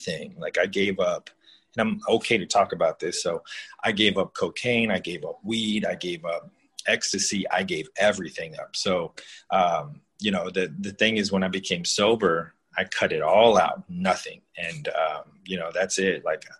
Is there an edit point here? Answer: no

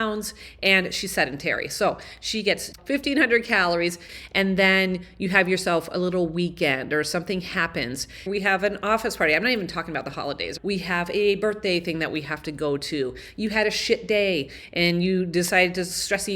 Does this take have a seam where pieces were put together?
yes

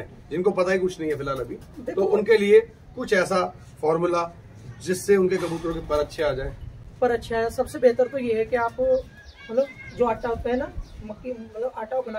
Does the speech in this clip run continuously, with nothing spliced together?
yes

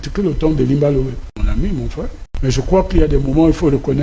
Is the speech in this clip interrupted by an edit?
yes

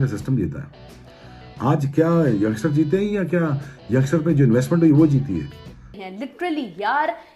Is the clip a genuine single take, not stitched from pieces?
no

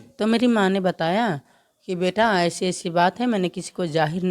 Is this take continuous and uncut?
yes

